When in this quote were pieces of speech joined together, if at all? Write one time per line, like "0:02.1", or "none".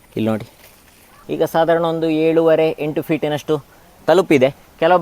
0:01.2